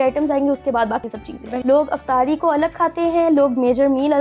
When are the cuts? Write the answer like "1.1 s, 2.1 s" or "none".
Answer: 1.5 s